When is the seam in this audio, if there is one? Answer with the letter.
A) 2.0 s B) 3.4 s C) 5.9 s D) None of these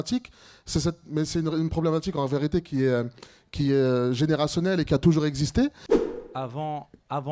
C